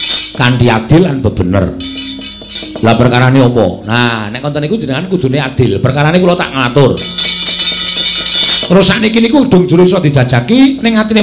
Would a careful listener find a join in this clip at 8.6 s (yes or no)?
yes